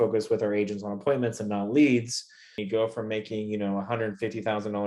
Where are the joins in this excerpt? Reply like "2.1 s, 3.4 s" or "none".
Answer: 2.6 s